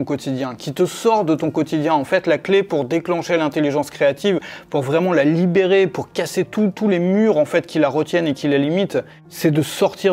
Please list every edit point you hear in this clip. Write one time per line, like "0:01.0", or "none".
0:09.2

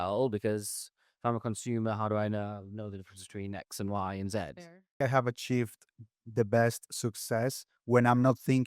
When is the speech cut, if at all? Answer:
0:05.0

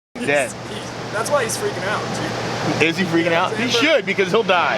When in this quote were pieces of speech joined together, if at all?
0:03.6

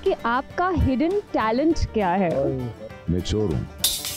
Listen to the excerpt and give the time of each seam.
0:02.8

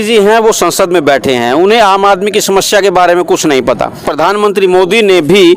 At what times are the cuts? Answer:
0:04.1

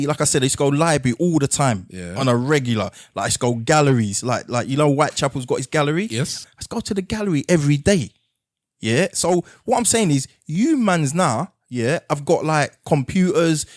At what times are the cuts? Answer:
0:06.4

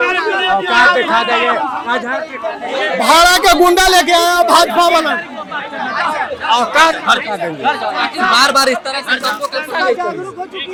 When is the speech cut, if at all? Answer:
none

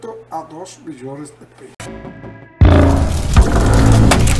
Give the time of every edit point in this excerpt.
0:01.6

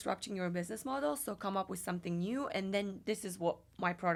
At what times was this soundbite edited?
none

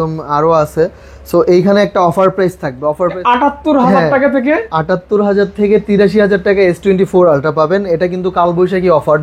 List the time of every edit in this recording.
0:03.2

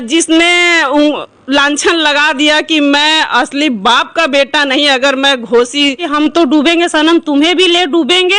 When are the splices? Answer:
0:06.1

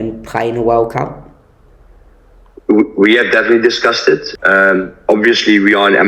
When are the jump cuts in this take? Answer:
0:04.3

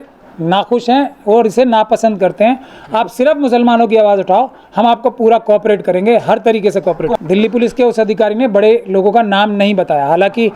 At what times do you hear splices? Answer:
0:07.1

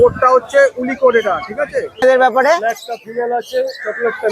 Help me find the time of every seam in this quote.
0:02.0

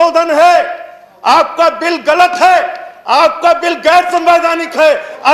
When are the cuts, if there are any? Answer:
none

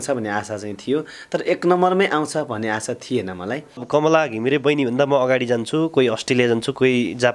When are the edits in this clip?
0:03.8

